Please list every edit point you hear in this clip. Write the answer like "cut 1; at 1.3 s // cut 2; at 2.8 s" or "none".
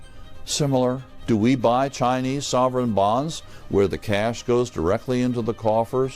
cut 1; at 1.1 s